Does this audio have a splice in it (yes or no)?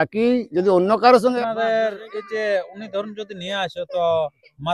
yes